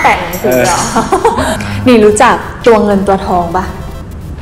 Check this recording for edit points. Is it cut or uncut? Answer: cut